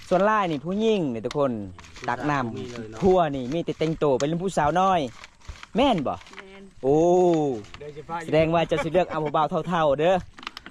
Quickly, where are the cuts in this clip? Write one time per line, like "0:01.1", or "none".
none